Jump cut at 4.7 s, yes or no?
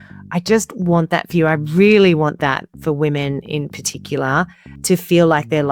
yes